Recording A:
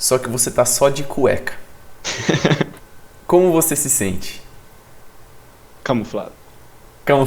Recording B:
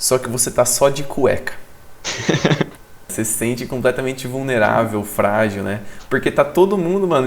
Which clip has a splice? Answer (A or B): B